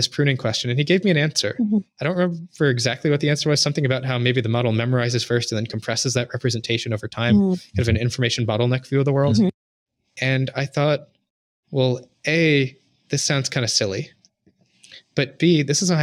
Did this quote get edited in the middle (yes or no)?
no